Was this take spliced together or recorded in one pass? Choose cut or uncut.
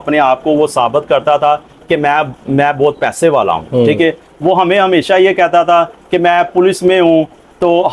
uncut